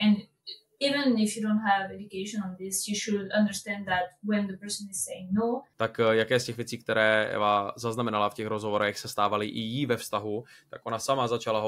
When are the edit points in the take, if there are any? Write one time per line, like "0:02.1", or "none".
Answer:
0:05.7